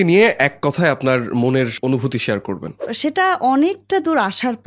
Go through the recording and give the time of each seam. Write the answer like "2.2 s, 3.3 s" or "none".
1.7 s, 2.9 s